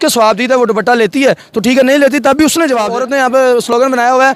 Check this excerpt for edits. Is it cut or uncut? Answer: cut